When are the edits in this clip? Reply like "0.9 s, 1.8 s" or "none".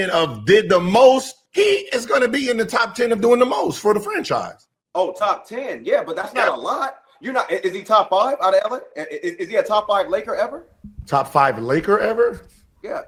none